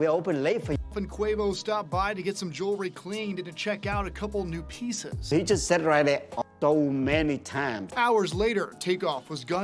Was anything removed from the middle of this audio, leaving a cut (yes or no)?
yes